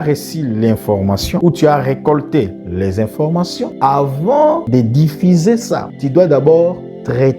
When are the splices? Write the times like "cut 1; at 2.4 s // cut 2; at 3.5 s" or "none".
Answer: cut 1; at 1.4 s // cut 2; at 3.7 s // cut 3; at 4.6 s // cut 4; at 5.9 s